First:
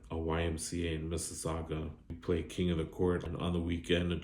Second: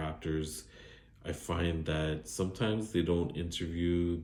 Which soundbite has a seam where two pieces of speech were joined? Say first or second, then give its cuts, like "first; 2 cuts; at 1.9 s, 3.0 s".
first; 2 cuts; at 1.9 s, 3.2 s